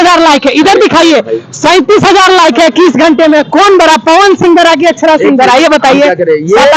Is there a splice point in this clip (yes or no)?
no